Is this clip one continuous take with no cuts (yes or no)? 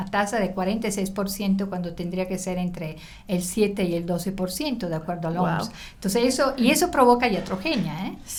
yes